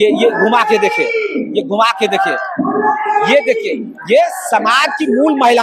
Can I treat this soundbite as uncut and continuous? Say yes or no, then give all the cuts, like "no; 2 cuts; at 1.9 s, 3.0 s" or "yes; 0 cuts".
yes; 0 cuts